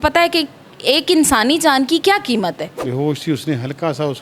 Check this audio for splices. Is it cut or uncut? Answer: cut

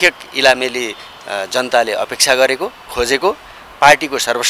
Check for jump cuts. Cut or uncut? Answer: uncut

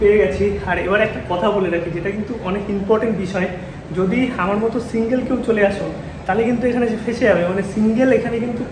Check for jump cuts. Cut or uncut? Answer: uncut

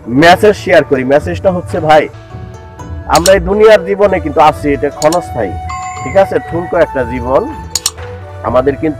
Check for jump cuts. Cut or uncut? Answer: uncut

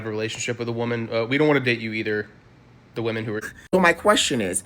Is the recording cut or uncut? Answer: cut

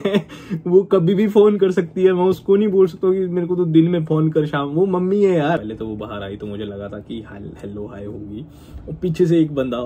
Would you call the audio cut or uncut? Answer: cut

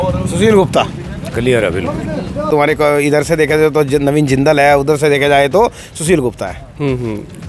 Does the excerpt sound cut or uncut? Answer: cut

